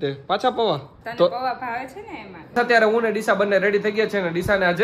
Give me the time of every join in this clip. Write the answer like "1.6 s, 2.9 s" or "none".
1.0 s, 2.4 s